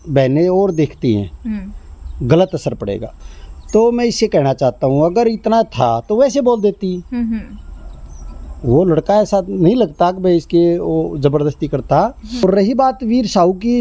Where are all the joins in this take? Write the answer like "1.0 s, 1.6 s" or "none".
3.1 s, 12.4 s